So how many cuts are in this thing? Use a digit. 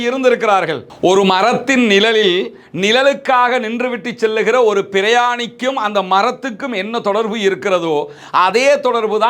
1